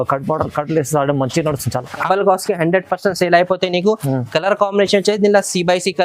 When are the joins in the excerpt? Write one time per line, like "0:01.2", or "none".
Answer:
0:02.1